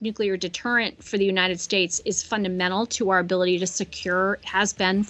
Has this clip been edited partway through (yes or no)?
no